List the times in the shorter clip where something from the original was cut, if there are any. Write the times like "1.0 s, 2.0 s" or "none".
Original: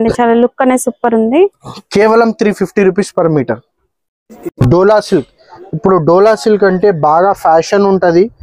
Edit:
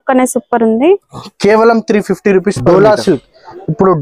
2.6 s